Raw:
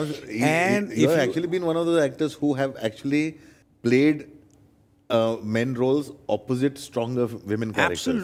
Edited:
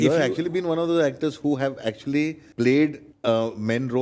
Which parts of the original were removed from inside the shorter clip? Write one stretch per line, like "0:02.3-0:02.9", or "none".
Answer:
0:03.4-0:03.7
0:04.3-0:04.9